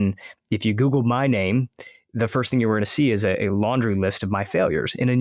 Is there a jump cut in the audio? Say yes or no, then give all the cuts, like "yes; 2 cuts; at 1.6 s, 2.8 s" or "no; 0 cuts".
no; 0 cuts